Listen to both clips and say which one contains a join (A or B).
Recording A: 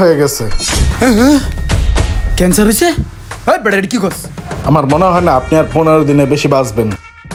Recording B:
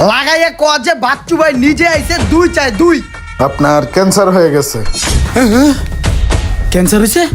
B